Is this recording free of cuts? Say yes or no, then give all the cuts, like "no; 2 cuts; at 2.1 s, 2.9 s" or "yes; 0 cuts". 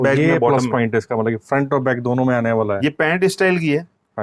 yes; 0 cuts